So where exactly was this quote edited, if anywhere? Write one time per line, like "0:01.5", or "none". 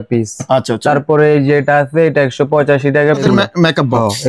0:03.2